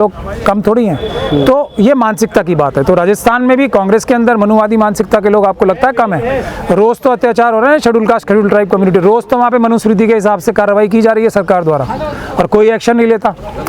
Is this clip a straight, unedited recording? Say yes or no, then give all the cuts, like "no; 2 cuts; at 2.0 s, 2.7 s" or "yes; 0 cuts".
yes; 0 cuts